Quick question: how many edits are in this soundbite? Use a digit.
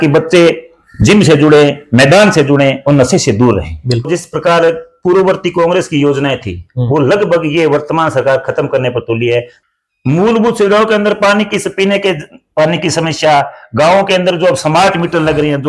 2